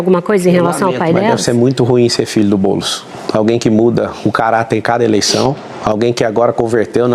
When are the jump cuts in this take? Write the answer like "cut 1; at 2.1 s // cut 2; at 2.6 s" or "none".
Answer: none